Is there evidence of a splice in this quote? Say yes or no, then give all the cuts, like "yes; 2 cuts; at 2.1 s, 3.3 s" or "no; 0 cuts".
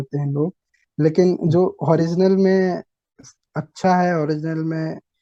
no; 0 cuts